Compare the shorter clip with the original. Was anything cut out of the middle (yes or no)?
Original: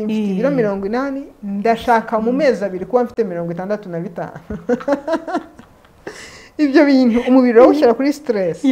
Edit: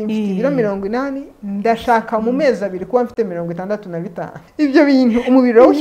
yes